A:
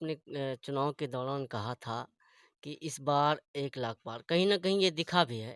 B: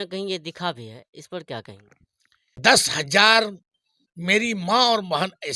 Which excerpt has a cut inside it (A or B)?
B